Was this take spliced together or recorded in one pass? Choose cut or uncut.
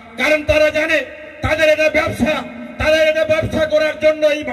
uncut